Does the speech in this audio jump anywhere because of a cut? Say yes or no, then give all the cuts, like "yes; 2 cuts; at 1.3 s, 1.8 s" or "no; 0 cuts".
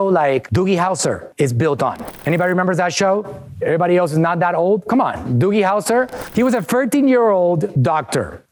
no; 0 cuts